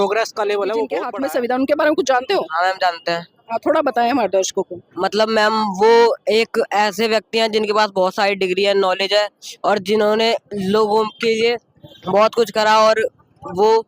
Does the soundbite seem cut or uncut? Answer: cut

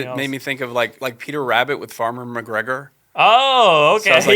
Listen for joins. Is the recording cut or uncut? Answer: cut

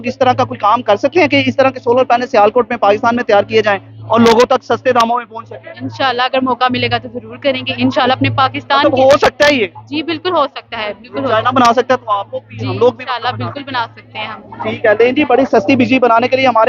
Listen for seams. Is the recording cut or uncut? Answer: uncut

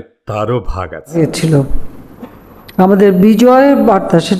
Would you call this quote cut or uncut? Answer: cut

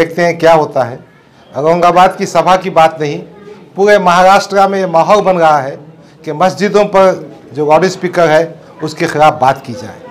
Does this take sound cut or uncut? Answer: uncut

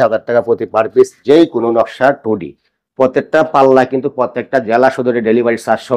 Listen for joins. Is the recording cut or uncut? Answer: uncut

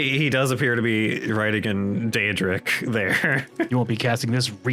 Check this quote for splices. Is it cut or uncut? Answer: cut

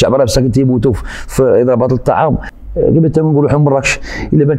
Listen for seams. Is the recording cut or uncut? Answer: cut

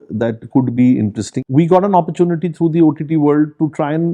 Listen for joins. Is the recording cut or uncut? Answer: cut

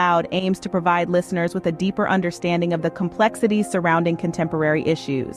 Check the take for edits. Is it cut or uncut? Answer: uncut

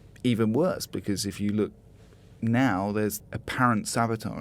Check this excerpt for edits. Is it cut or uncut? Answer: cut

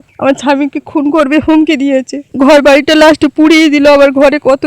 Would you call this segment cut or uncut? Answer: cut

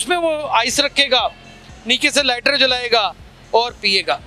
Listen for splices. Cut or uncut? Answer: uncut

